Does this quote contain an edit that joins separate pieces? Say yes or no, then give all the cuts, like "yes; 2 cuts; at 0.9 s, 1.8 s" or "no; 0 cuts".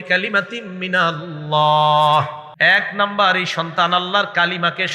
yes; 1 cut; at 2.4 s